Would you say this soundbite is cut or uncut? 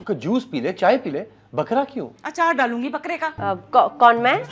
cut